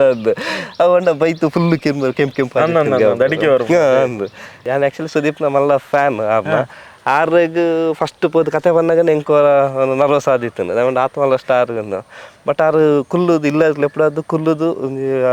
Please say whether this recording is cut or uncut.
cut